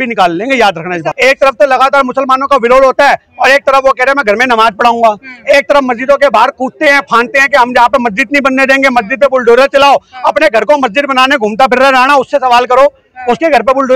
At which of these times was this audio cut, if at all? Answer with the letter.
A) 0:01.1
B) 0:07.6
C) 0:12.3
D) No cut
A